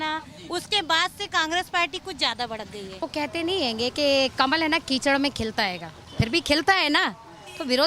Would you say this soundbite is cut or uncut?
cut